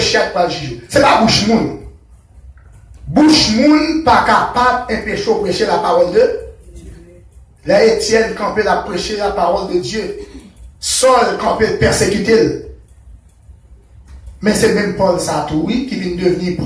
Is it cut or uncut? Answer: uncut